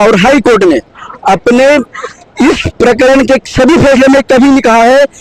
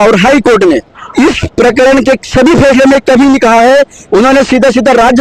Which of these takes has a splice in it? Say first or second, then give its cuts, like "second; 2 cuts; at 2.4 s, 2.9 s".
second; 2 cuts; at 1.0 s, 4.0 s